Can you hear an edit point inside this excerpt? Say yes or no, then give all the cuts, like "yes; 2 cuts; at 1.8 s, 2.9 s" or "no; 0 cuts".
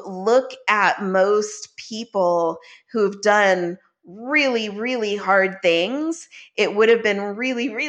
no; 0 cuts